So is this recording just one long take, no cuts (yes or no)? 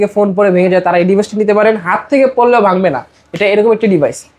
yes